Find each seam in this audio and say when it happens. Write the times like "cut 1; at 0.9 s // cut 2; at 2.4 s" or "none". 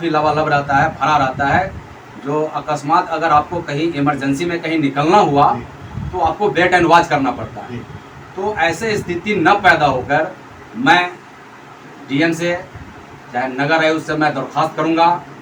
none